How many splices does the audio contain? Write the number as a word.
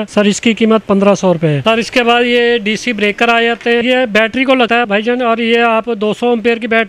two